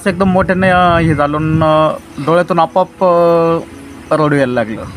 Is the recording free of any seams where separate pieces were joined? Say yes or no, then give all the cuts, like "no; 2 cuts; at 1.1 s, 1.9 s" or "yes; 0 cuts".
yes; 0 cuts